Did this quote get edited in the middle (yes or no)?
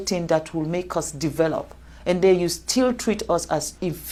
no